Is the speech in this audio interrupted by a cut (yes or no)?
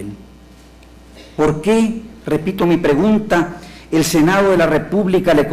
yes